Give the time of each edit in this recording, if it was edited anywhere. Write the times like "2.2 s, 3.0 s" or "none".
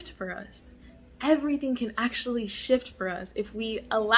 none